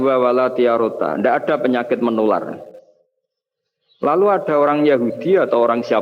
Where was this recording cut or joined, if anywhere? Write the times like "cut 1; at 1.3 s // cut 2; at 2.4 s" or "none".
none